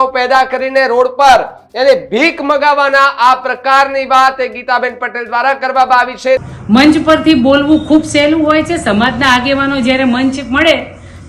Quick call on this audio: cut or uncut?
cut